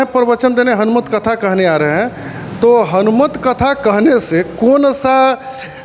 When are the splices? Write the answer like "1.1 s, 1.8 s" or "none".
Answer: none

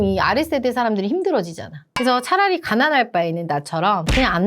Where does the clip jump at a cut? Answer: 1.8 s

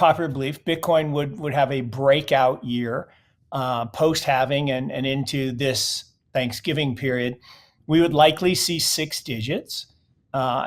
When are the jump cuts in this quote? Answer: none

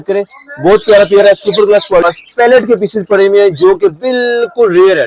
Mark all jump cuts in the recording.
2.1 s

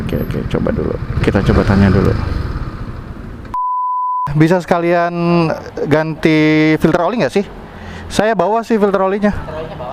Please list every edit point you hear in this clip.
none

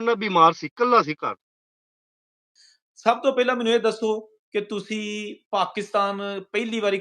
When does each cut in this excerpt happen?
2.0 s

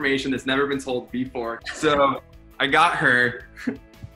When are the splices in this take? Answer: 1.6 s

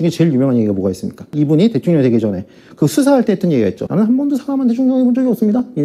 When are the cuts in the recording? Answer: 1.3 s, 3.8 s

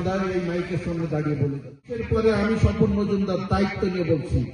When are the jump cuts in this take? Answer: 2.0 s

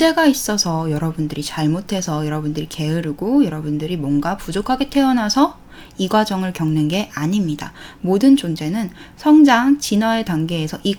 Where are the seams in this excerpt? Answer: none

